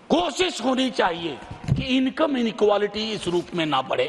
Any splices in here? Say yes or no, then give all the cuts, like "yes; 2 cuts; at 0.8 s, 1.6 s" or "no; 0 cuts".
no; 0 cuts